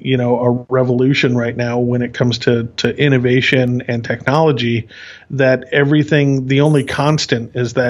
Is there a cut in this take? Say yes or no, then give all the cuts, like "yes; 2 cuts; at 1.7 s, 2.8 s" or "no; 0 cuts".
no; 0 cuts